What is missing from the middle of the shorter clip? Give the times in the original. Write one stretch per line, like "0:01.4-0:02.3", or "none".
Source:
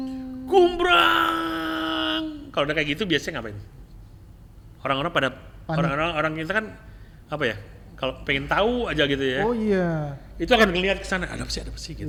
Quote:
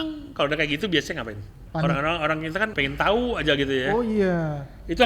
0:03.7-0:05.5
0:06.7-0:08.2